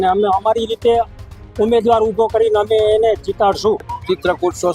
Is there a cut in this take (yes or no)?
no